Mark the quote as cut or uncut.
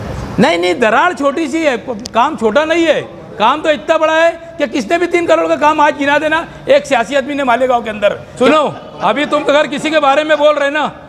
cut